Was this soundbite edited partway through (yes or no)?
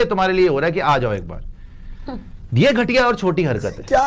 no